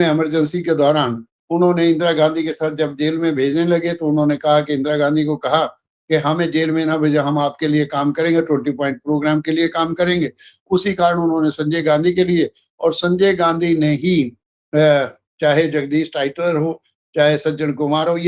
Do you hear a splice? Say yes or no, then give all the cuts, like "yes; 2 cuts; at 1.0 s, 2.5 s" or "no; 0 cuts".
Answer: no; 0 cuts